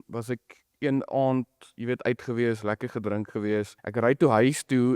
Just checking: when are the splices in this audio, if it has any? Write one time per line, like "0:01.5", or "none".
0:03.8